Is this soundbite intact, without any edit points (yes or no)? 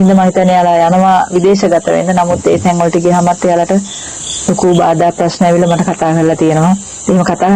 yes